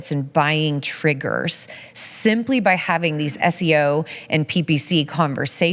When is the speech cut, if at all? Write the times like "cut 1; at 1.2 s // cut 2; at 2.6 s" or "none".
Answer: none